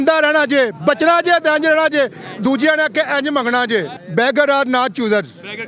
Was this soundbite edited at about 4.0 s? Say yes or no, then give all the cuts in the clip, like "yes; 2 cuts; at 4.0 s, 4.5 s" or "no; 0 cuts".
yes; 1 cut; at 4.0 s